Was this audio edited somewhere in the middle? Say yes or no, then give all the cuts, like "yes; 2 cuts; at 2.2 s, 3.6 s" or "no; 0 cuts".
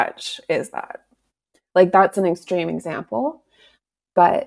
no; 0 cuts